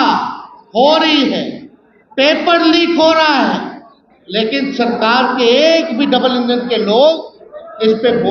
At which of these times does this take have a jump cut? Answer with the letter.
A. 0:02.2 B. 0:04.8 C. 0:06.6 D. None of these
D